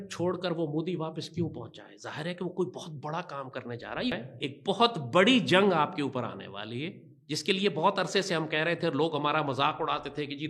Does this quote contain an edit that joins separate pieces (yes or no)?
yes